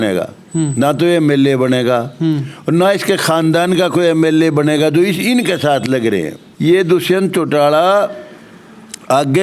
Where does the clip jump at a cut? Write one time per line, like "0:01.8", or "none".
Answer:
0:06.4